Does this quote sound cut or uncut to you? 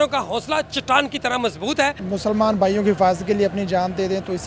cut